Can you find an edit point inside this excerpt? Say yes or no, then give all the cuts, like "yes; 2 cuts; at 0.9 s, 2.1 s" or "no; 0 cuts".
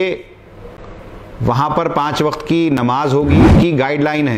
yes; 1 cut; at 3.4 s